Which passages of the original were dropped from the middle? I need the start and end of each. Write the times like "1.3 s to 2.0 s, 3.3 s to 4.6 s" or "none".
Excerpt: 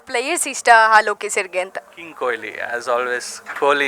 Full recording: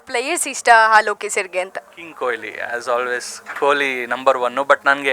none